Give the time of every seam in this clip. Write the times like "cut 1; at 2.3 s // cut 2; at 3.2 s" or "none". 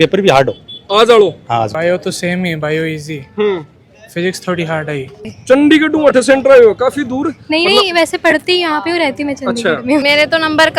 cut 1; at 1.7 s // cut 2; at 5.3 s // cut 3; at 10.0 s